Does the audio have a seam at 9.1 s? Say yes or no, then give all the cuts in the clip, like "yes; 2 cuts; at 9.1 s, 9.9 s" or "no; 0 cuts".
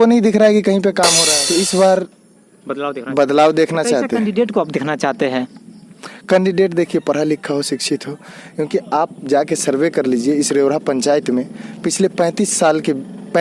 no; 1 cut; at 1.2 s